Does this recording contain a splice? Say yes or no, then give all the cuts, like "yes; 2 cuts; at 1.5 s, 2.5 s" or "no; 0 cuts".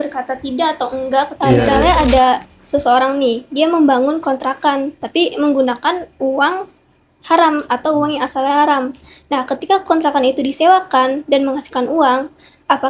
yes; 1 cut; at 1.8 s